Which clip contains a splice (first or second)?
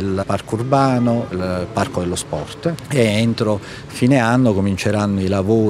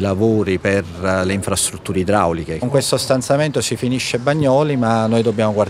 second